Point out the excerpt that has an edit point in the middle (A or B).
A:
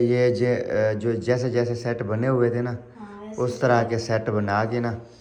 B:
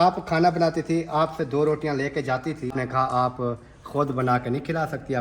B